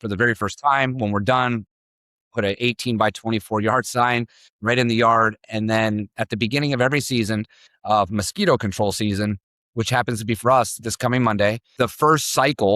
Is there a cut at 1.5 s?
no; 1 cut; at 11.6 s

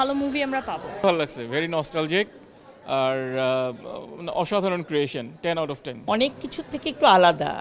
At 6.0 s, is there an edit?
yes; 2 cuts; at 0.9 s, 6.0 s

